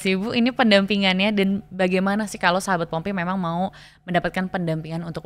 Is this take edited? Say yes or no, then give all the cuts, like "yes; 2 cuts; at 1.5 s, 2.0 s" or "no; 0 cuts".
no; 0 cuts